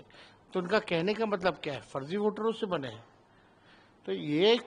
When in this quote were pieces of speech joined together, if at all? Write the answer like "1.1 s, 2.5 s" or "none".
none